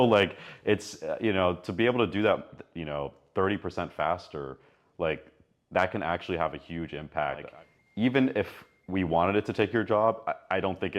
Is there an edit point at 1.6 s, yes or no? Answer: no